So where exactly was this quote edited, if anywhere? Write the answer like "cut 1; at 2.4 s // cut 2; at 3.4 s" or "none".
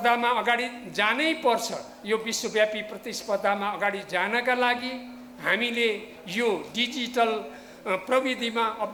none